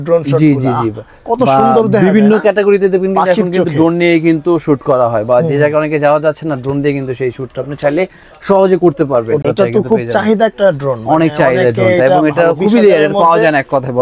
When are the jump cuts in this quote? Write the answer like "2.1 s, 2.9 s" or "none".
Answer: 9.4 s